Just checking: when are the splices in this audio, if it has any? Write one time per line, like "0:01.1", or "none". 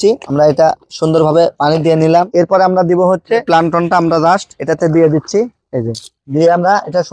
0:02.3
0:03.5